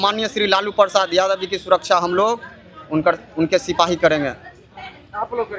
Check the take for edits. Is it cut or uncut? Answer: uncut